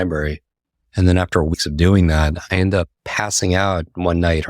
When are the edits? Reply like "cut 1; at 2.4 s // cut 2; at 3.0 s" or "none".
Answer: cut 1; at 1.5 s // cut 2; at 3.0 s